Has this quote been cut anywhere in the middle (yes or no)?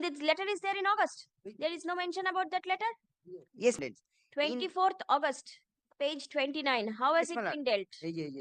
yes